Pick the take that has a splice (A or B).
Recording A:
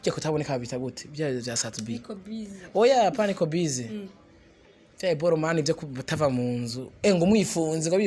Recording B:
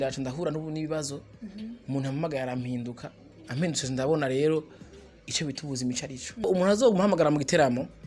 B